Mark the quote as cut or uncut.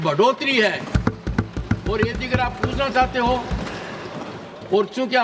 uncut